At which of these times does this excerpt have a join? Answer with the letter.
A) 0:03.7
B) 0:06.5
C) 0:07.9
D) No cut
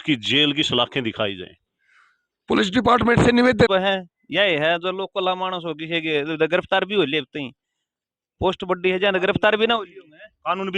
A